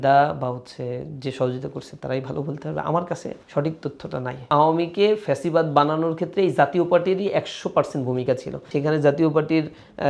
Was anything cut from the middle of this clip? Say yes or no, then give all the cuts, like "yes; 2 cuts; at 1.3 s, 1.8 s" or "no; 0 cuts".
yes; 3 cuts; at 3.4 s, 4.5 s, 8.7 s